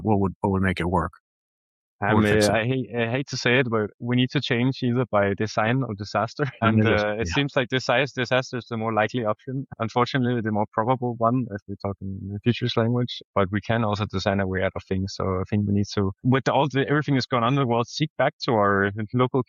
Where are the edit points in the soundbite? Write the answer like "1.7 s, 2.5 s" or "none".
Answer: none